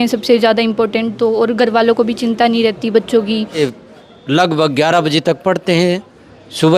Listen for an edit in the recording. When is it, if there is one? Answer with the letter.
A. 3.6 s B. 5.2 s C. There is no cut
A